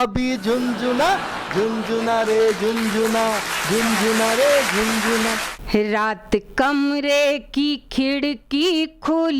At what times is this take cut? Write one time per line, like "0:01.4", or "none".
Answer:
0:05.5